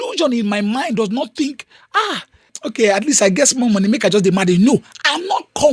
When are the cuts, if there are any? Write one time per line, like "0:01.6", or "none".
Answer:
0:02.5